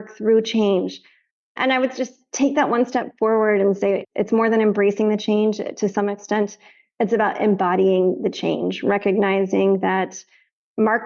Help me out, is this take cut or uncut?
uncut